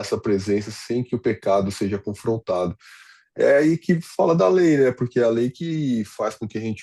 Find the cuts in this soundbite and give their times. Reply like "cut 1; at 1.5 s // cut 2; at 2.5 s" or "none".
none